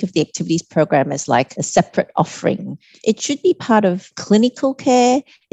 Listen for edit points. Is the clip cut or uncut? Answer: cut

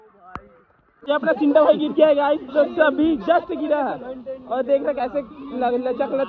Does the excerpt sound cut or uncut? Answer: cut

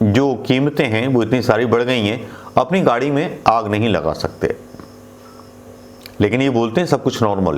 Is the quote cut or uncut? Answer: uncut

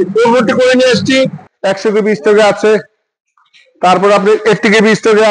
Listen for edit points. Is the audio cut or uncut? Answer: cut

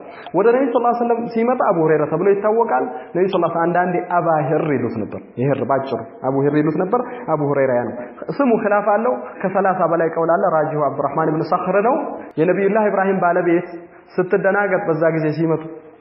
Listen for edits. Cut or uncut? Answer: cut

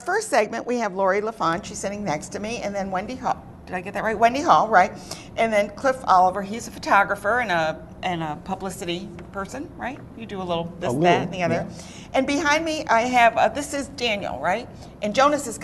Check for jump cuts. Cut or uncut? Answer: cut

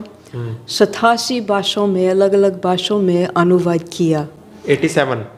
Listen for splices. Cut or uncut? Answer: uncut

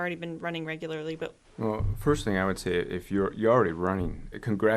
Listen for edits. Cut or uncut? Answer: cut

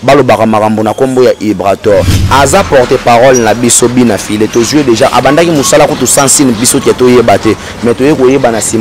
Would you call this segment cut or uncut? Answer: cut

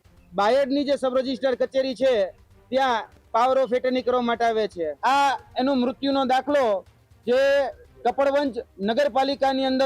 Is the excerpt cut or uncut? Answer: cut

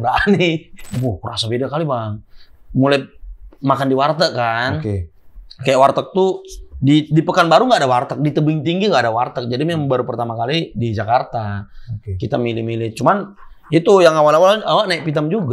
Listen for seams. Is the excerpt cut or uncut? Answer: cut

